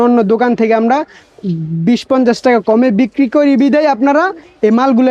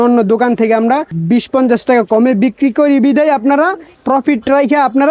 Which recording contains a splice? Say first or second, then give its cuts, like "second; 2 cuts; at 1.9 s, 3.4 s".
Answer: second; 2 cuts; at 1.1 s, 3.9 s